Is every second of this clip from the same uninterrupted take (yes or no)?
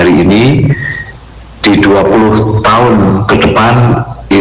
yes